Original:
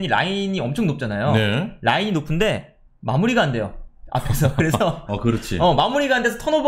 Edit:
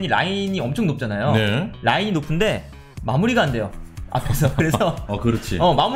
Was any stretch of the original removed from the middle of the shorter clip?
no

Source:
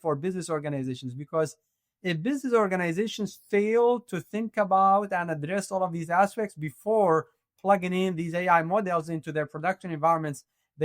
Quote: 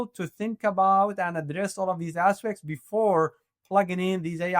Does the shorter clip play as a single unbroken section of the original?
yes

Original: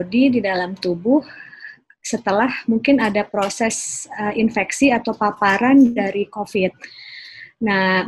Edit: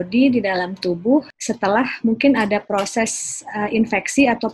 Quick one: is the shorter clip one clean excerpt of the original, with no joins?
no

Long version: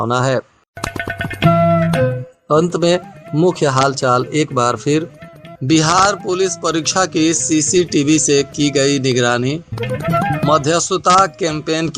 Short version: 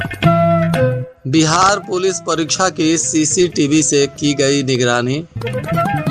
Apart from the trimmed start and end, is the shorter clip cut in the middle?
yes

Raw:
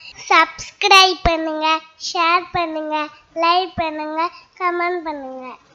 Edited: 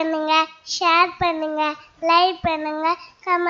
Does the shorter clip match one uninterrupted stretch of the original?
yes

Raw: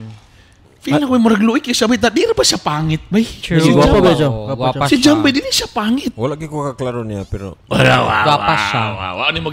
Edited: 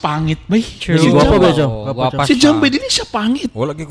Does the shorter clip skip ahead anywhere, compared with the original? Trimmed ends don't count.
no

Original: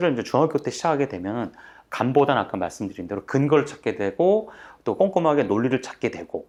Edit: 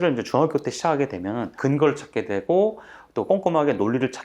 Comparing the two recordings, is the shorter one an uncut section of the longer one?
no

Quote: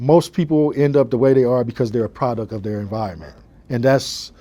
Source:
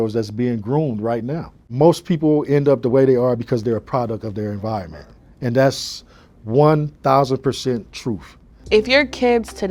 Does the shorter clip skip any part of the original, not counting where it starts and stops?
no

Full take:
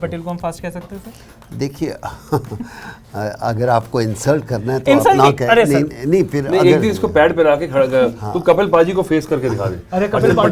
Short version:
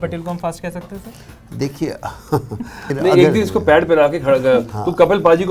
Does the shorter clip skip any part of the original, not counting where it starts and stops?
yes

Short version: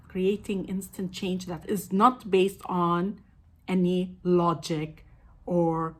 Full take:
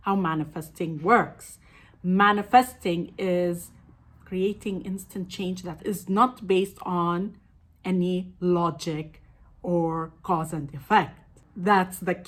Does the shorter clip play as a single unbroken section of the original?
yes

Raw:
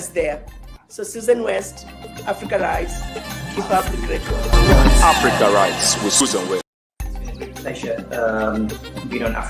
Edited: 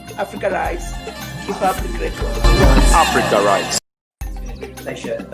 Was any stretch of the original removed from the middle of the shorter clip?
yes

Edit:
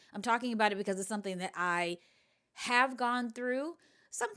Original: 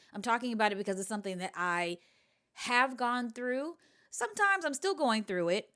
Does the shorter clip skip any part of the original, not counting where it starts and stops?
no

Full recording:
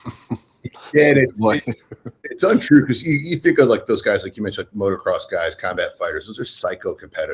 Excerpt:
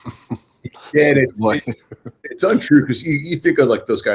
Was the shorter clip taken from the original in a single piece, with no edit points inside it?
yes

